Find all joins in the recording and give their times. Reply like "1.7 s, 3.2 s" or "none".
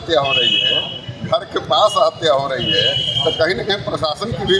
none